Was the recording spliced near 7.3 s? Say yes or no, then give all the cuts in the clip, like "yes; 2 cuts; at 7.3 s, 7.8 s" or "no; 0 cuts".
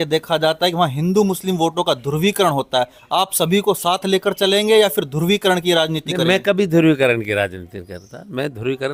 no; 0 cuts